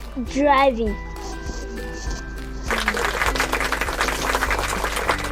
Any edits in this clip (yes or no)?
no